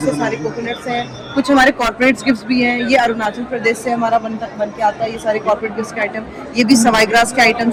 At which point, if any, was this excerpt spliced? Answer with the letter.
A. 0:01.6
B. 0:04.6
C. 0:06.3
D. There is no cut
D